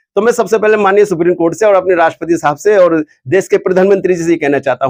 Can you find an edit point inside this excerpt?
no; 0 cuts

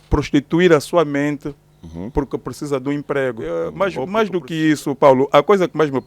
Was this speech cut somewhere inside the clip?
yes; 1 cut; at 3.4 s

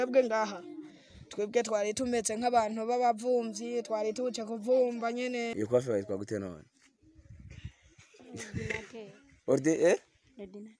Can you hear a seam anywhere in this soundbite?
yes; 1 cut; at 5.5 s

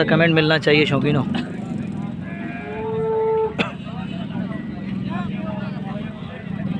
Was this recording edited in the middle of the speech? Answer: no; 0 cuts

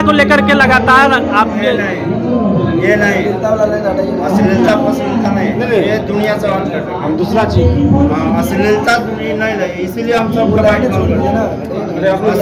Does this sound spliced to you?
no; 0 cuts

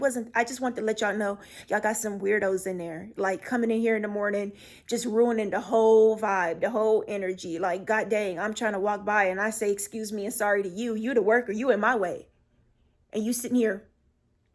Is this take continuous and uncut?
yes; 0 cuts

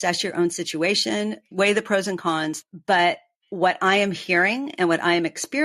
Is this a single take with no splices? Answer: no; 2 cuts; at 1.4 s, 2.6 s

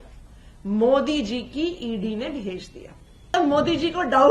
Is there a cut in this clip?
yes; 1 cut; at 3.3 s

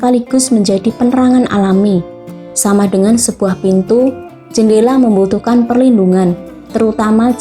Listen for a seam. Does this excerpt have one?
no; 0 cuts

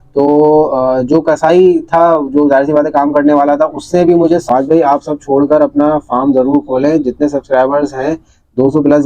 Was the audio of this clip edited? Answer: yes; 1 cut; at 4.4 s

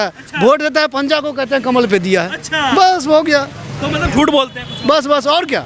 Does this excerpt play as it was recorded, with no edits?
yes; 0 cuts

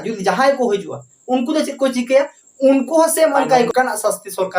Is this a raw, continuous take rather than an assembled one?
no; 1 cut; at 3.7 s

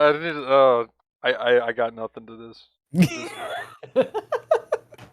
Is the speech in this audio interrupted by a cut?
yes; 1 cut; at 1.0 s

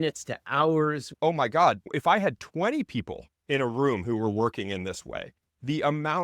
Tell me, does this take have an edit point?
yes; 1 cut; at 1.1 s

